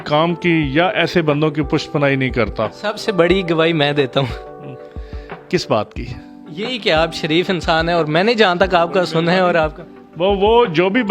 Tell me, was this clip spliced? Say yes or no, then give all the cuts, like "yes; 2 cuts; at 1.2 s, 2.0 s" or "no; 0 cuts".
no; 0 cuts